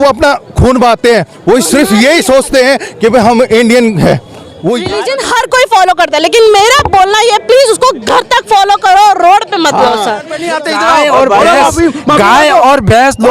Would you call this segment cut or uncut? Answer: cut